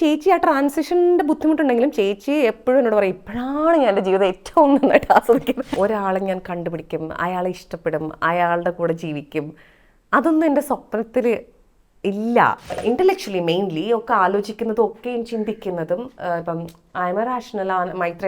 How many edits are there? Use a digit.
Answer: 2